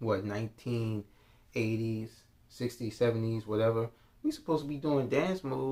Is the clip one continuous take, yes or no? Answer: yes